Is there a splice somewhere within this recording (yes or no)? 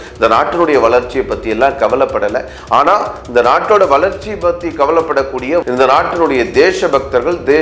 yes